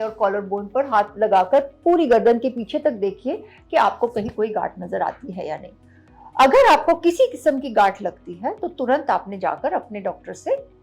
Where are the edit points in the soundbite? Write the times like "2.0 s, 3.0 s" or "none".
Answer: none